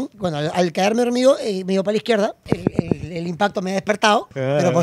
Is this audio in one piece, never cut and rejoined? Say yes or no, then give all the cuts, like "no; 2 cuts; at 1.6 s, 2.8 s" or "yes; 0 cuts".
no; 1 cut; at 2.5 s